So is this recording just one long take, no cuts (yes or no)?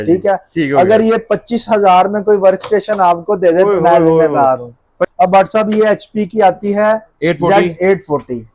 no